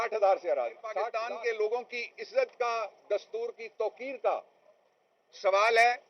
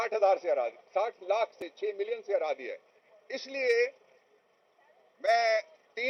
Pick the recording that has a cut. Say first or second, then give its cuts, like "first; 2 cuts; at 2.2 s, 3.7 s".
first; 1 cut; at 1.1 s